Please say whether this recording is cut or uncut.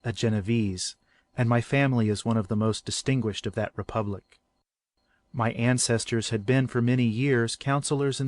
cut